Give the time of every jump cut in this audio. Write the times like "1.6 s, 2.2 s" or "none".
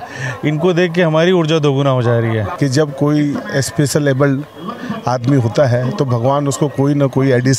2.5 s